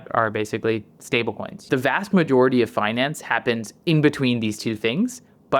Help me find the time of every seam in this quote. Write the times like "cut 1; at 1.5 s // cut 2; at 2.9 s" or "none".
cut 1; at 1.5 s